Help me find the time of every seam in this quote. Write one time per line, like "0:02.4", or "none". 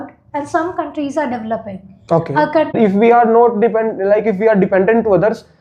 0:02.8